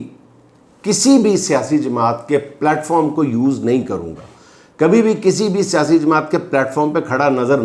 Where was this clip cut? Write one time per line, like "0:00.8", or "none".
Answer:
none

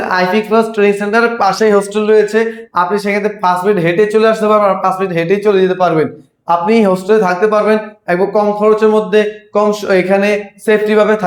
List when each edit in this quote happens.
none

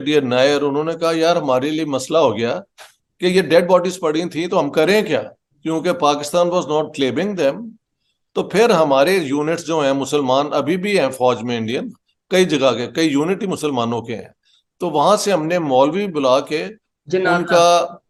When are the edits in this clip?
none

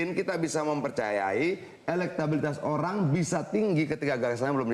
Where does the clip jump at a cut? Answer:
none

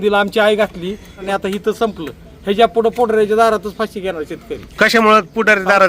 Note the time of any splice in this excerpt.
0:01.2

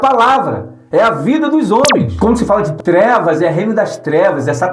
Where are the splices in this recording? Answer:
0:02.1

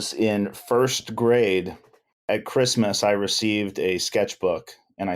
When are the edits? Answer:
0:02.3

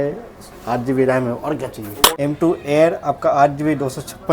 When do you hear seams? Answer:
0:02.2

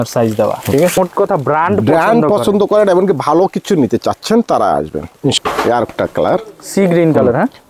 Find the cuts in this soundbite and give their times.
0:01.0
0:05.4

